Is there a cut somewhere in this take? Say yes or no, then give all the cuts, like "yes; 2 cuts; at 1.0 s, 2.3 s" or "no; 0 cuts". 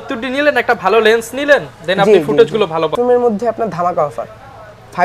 yes; 1 cut; at 2.9 s